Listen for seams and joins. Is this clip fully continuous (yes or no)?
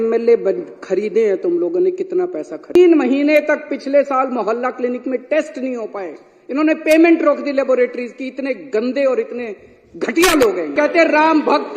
no